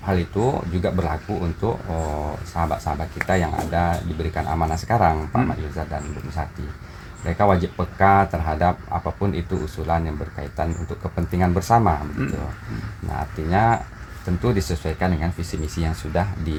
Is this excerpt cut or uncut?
uncut